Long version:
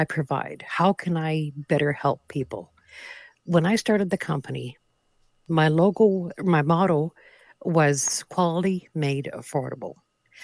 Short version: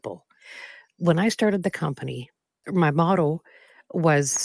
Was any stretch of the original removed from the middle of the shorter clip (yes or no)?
yes